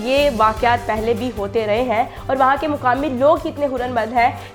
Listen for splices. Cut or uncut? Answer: uncut